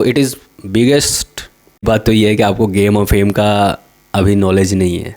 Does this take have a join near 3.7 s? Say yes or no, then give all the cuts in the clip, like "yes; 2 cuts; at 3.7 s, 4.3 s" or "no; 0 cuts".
no; 1 cut; at 1.8 s